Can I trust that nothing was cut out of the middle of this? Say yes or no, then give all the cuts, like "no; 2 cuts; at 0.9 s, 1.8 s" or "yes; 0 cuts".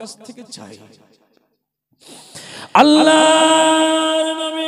yes; 0 cuts